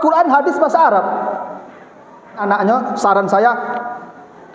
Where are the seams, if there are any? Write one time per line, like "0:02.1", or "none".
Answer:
0:02.4